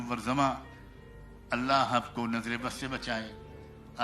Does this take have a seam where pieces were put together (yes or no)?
no